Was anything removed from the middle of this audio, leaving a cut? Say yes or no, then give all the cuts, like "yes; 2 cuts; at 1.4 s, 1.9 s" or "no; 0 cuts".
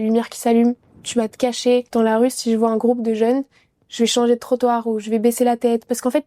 yes; 1 cut; at 1.9 s